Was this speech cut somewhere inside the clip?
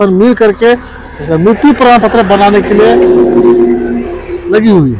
no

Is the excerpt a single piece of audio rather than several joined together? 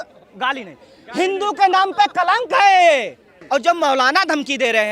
no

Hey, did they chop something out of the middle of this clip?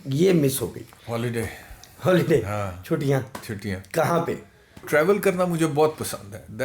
yes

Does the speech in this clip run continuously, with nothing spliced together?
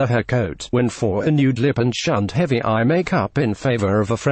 no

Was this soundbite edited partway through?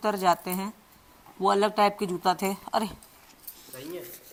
no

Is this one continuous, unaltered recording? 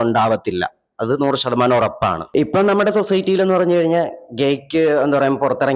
yes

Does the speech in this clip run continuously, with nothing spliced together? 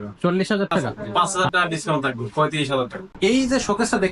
no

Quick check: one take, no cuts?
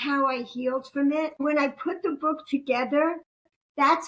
no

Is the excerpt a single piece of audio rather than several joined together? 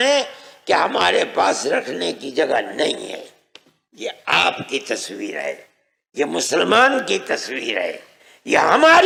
yes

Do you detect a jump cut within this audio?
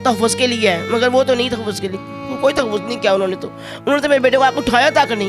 no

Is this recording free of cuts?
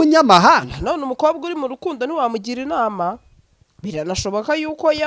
yes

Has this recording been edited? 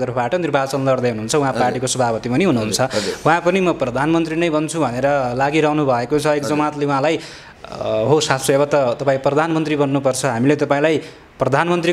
no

